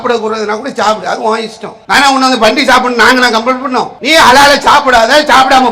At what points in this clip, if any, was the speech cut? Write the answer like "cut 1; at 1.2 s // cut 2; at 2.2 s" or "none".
cut 1; at 4.0 s